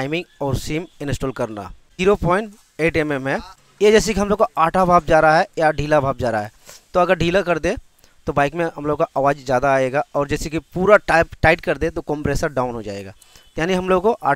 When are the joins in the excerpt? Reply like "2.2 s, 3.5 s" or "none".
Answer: 1.9 s, 3.5 s